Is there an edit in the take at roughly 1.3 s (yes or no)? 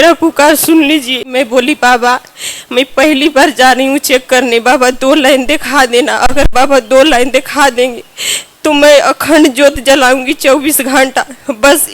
yes